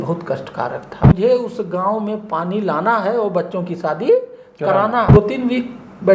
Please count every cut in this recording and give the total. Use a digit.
2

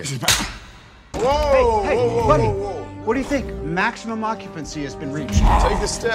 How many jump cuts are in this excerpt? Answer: 1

